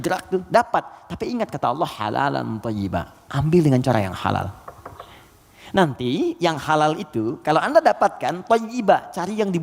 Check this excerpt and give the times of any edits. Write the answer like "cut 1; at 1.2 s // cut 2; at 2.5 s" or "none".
none